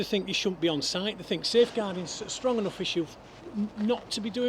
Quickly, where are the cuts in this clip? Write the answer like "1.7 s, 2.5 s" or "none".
none